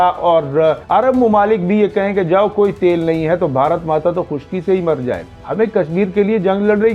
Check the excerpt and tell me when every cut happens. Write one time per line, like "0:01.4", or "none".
0:00.8
0:05.4